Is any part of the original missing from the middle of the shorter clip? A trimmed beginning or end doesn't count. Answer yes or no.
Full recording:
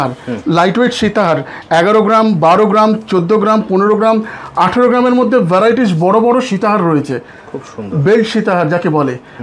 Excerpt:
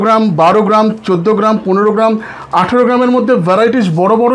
no